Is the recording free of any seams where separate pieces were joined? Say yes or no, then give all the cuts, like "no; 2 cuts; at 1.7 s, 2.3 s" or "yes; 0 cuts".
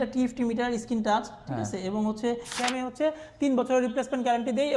no; 1 cut; at 2.5 s